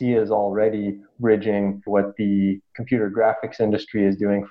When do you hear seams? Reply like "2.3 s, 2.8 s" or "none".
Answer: 1.8 s